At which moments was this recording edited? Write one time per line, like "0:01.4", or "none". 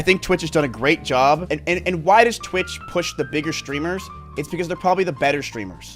0:01.5

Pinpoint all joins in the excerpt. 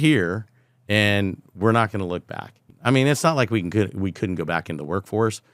0:02.6

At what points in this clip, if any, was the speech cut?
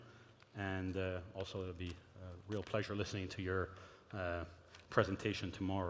0:01.3

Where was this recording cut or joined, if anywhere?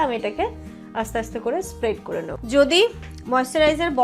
0:02.5

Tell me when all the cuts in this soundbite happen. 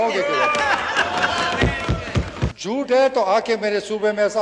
0:02.6

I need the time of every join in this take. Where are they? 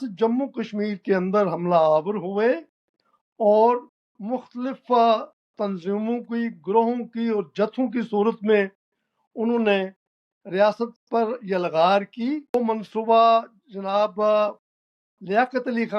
0:12.5

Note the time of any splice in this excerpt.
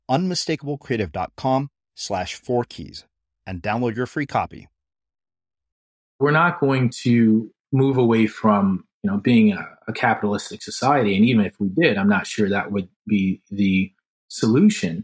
0:06.2

